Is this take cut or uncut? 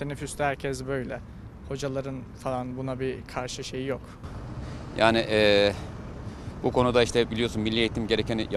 uncut